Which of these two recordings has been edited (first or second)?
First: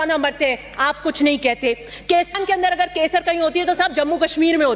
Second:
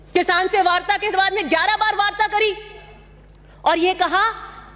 first